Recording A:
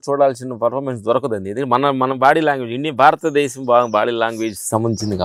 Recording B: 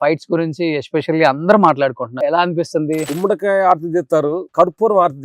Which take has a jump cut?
B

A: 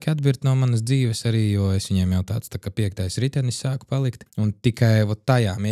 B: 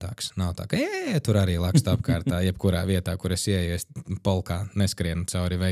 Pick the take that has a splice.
A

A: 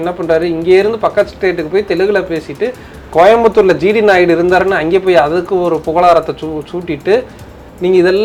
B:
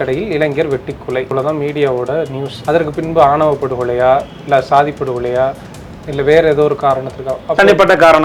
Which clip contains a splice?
B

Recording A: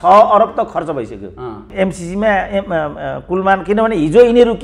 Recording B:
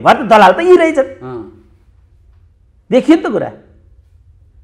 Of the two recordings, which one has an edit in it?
A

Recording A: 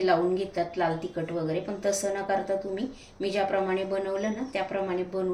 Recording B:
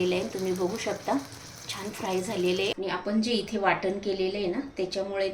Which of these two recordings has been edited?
B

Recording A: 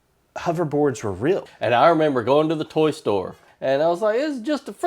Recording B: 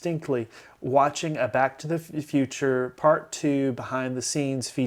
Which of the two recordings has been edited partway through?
A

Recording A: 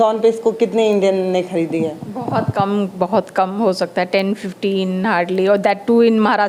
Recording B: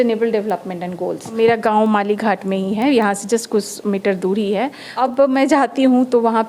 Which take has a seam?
B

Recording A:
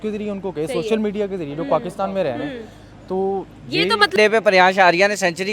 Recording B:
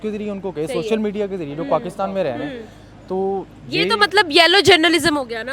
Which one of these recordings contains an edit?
A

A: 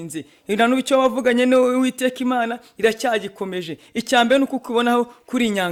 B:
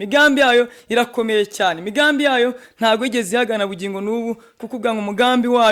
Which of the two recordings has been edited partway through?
B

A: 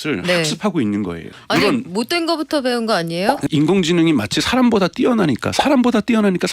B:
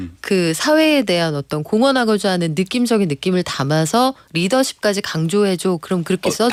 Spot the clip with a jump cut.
A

